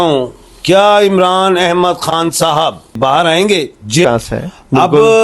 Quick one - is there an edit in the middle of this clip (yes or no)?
yes